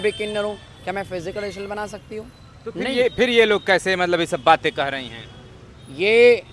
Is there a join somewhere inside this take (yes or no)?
no